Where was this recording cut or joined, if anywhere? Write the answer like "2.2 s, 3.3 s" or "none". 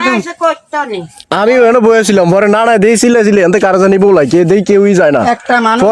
none